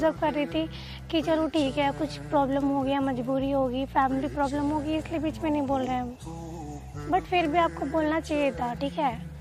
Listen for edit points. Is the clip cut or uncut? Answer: uncut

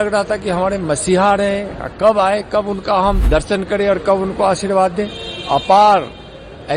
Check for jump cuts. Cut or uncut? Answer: cut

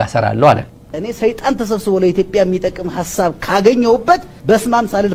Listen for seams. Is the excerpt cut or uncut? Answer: uncut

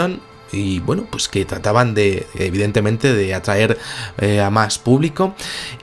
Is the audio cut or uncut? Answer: cut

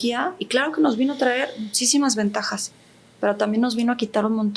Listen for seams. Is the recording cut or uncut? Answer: uncut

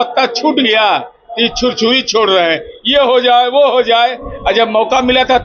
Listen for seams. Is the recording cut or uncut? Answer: uncut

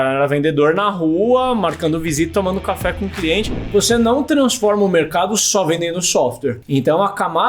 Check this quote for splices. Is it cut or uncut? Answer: cut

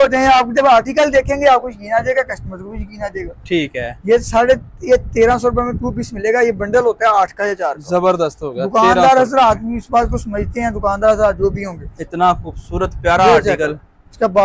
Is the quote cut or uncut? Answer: uncut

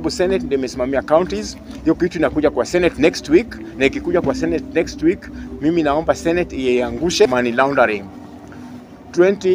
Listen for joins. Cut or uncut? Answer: cut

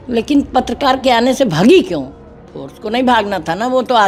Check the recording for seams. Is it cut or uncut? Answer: uncut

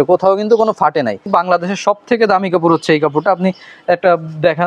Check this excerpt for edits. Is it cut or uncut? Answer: cut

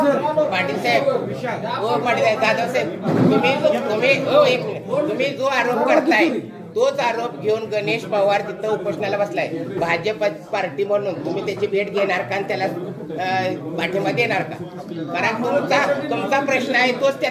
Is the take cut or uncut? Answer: uncut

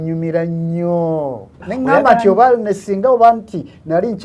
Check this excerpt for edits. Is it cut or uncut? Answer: cut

